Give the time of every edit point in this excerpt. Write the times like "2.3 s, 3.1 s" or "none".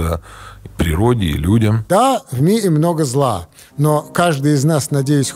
1.8 s